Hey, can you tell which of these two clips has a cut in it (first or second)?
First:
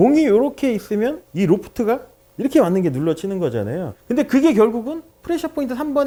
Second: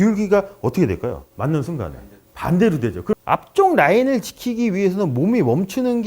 second